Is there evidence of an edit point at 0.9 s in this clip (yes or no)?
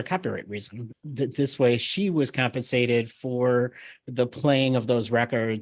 yes